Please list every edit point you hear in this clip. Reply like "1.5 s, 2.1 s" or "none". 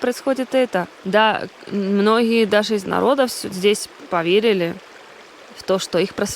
0.9 s

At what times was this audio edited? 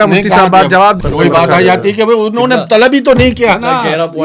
1.0 s

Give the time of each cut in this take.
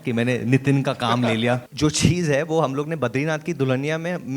1.7 s

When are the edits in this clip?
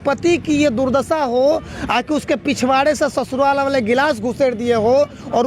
none

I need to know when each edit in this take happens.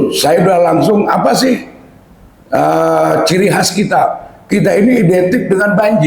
none

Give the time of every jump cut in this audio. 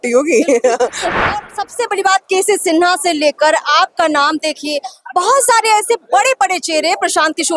1.0 s

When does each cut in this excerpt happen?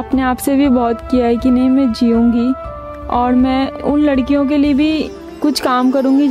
none

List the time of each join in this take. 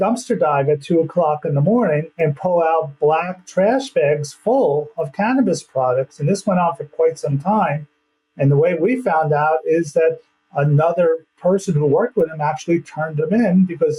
none

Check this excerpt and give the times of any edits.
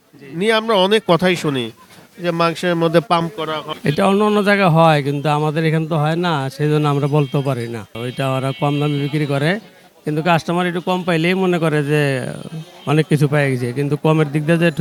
none

